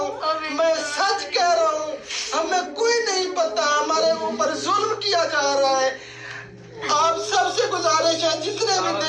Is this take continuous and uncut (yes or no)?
yes